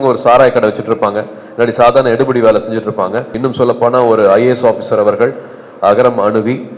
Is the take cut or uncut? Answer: cut